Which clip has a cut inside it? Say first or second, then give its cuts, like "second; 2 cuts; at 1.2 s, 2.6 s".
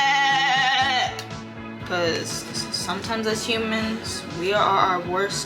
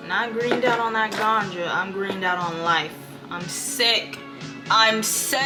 first; 1 cut; at 1.7 s